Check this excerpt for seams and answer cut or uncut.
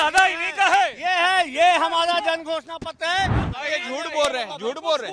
cut